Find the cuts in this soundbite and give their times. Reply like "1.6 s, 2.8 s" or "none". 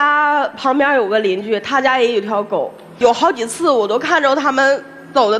none

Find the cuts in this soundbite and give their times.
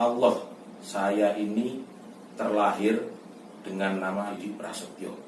4.3 s

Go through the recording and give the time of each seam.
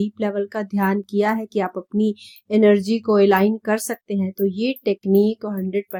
none

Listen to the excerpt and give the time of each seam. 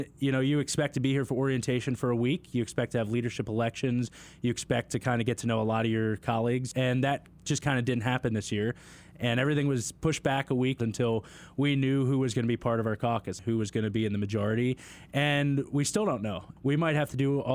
6.7 s, 10.8 s, 13.4 s, 16.5 s

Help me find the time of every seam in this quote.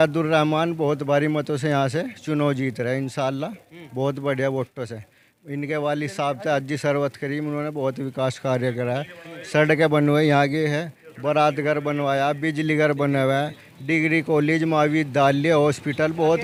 none

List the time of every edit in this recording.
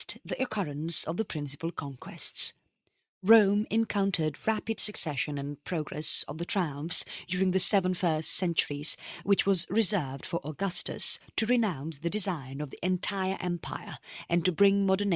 none

